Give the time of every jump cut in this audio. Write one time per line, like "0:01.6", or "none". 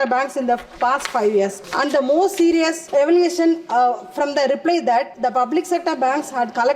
0:01.6
0:02.8
0:05.1